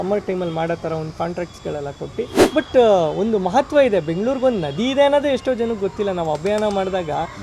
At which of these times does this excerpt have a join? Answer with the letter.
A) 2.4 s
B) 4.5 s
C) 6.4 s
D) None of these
A